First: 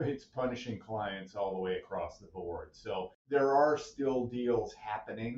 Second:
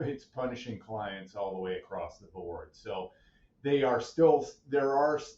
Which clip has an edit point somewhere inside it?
first; 1 cut; at 3.2 s

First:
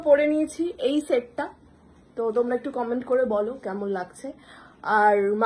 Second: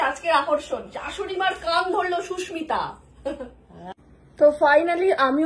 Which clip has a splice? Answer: second; 1 cut; at 3.9 s

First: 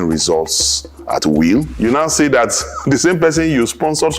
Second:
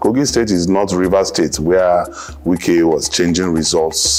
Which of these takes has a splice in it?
first; 1 cut; at 1.7 s

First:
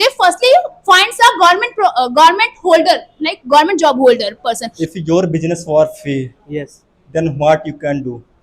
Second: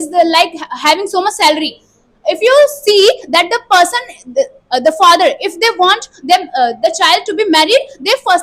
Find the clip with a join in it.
first; 1 cut; at 4.7 s

